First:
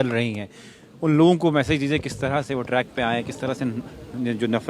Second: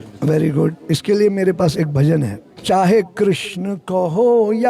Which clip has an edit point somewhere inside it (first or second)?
second